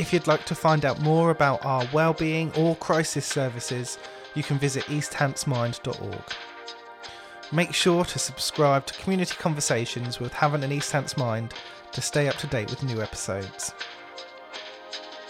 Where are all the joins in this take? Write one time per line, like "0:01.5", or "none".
0:06.2
0:07.5
0:13.5